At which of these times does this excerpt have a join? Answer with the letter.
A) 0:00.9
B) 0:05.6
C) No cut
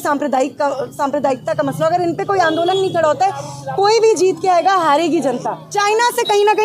B